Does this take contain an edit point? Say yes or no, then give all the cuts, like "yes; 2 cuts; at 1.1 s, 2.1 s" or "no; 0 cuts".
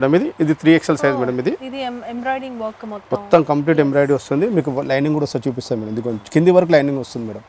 no; 0 cuts